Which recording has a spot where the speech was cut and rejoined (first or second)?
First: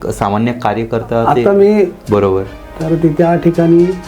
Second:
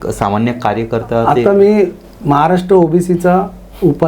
first